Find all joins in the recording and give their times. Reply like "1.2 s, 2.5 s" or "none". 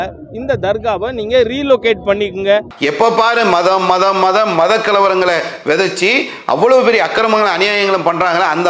2.7 s